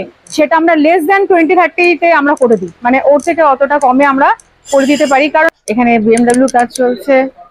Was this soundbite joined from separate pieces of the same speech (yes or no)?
yes